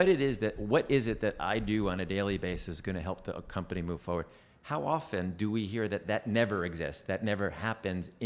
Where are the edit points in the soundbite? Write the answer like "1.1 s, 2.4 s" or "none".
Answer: none